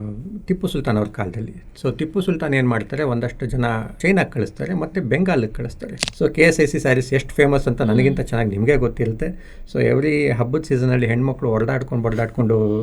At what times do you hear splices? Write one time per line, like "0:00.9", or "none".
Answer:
0:04.0
0:06.0